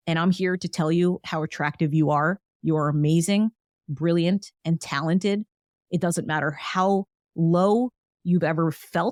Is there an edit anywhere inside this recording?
no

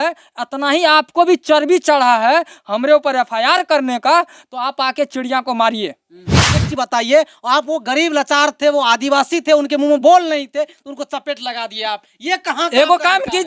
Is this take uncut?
no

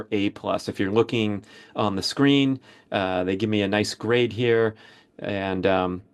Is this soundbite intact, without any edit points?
yes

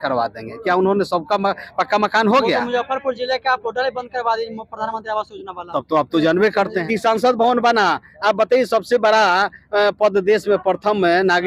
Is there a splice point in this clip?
yes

